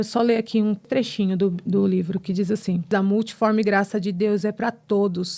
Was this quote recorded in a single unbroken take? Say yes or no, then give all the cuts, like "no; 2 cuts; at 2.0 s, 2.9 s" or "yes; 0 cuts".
no; 2 cuts; at 0.9 s, 2.9 s